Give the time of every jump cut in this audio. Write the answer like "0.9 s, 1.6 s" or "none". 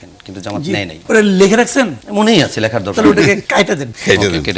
1.0 s, 2.0 s, 3.7 s